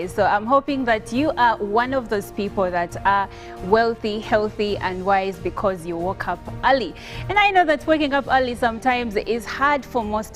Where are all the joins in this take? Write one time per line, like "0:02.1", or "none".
0:07.1